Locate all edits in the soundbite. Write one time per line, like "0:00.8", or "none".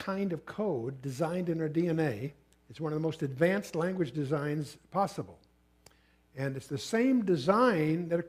none